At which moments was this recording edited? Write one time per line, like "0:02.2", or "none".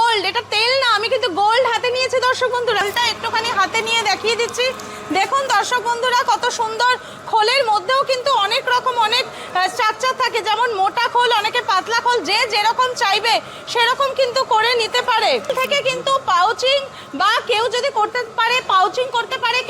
0:02.8
0:15.5